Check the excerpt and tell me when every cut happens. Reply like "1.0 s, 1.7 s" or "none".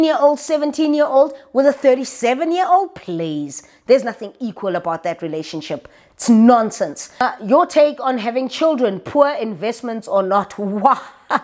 7.2 s